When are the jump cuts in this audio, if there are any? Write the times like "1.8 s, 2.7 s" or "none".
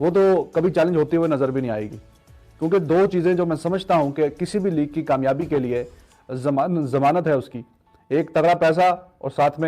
none

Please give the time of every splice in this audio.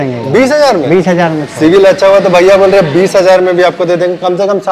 none

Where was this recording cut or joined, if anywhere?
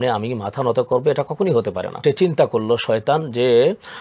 2.0 s

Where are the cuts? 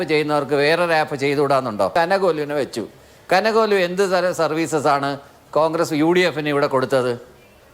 1.9 s

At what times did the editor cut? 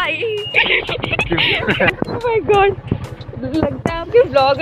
1.9 s

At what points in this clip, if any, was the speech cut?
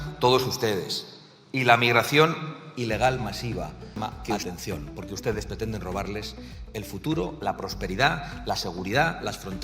3.9 s

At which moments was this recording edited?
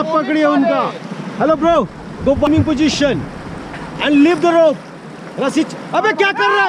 2.5 s

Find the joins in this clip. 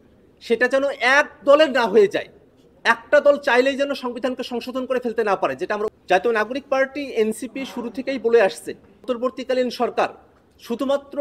5.9 s, 9.1 s

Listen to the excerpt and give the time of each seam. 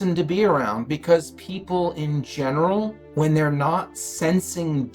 3.0 s

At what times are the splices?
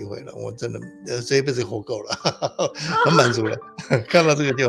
none

